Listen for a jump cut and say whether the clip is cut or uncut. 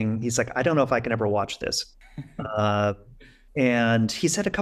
uncut